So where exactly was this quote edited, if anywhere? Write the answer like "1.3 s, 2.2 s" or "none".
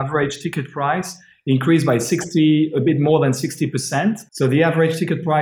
4.3 s